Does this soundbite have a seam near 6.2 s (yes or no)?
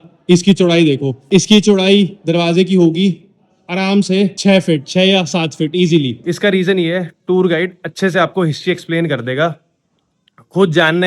yes